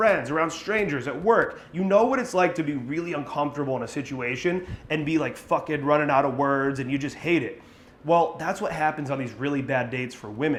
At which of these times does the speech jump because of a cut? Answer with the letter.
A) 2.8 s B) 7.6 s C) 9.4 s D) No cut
D